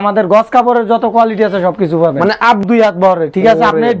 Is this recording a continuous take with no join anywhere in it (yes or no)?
no